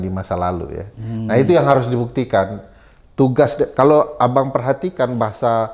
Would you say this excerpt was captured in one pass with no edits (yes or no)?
yes